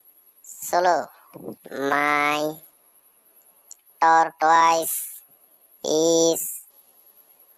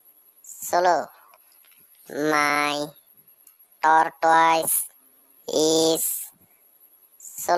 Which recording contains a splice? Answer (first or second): first